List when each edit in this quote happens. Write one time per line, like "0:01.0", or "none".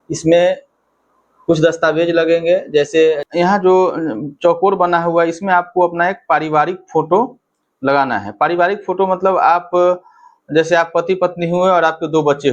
0:03.2